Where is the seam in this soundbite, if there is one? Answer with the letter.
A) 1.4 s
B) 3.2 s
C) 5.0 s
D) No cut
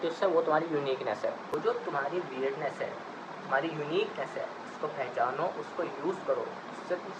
A